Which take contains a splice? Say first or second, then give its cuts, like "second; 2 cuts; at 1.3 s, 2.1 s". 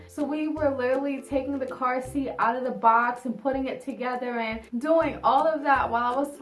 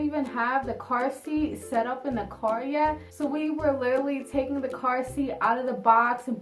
first; 1 cut; at 4.7 s